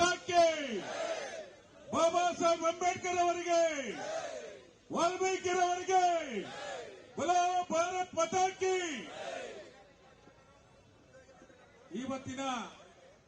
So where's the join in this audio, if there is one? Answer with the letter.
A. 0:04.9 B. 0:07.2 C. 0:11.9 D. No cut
C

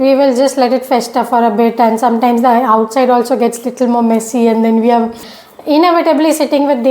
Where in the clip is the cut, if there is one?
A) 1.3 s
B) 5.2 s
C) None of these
B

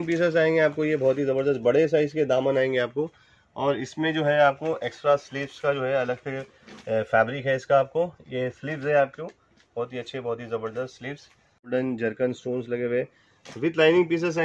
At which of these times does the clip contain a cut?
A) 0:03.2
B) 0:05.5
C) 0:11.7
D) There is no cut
C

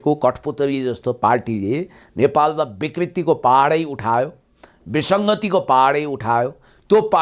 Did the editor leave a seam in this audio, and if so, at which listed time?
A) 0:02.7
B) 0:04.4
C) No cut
C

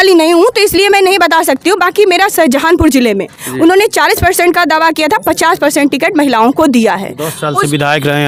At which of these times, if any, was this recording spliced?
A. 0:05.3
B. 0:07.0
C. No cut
C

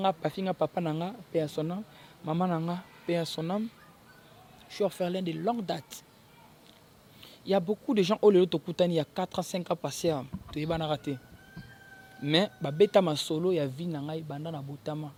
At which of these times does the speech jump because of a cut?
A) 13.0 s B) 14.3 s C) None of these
C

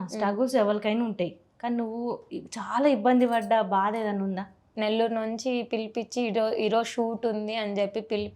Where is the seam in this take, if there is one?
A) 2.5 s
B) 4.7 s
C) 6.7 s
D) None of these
B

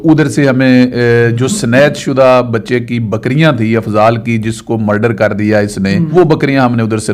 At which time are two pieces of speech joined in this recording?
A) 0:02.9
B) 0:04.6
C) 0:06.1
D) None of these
C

